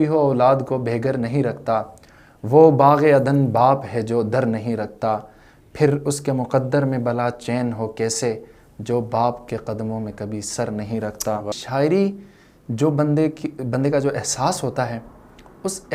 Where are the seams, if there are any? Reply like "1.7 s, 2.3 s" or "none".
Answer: 11.5 s